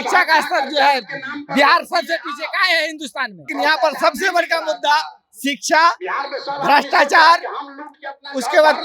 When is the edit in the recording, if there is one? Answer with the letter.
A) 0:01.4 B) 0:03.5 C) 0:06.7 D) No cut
B